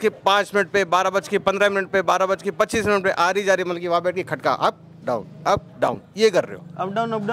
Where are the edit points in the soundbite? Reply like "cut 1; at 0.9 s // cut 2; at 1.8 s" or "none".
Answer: none